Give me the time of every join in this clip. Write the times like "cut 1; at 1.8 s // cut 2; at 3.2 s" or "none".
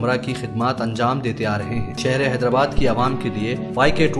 cut 1; at 1.9 s